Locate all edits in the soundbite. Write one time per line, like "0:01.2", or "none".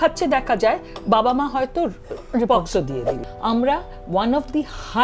0:03.2